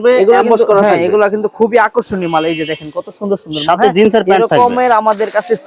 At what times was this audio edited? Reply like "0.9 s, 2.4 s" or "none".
none